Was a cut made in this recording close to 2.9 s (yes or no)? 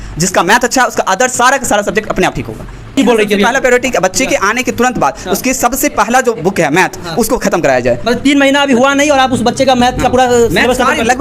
yes